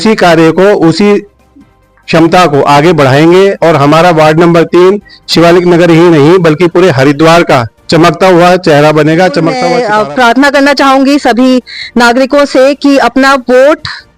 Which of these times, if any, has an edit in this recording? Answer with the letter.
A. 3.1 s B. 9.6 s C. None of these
B